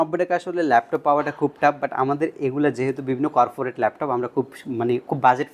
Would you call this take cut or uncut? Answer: uncut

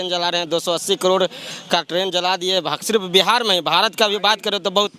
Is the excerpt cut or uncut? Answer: uncut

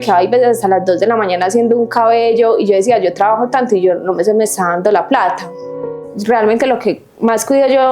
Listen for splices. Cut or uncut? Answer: cut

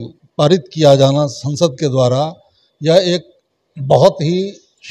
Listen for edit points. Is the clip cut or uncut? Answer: uncut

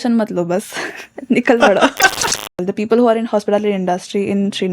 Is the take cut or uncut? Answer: cut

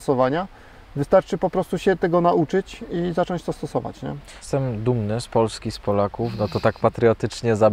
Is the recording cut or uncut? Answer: cut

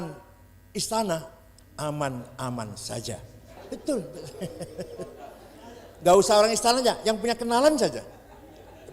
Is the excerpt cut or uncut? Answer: cut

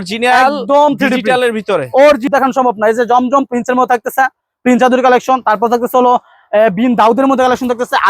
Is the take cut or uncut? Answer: cut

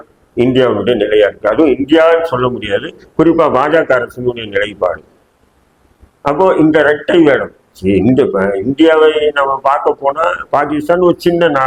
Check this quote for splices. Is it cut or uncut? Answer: uncut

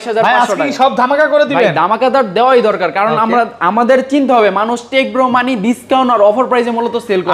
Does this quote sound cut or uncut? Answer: uncut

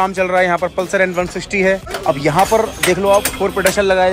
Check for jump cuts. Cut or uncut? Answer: cut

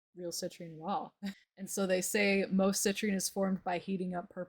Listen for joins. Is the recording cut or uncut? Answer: cut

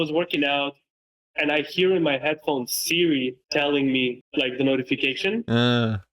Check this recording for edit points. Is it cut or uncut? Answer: cut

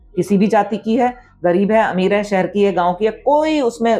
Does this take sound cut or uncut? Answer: uncut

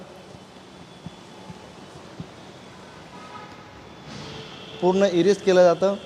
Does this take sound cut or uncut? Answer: uncut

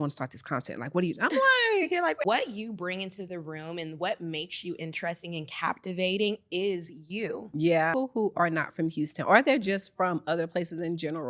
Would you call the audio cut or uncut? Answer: cut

